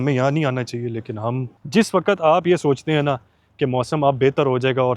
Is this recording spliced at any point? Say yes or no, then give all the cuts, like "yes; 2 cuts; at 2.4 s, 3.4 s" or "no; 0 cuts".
yes; 1 cut; at 1.5 s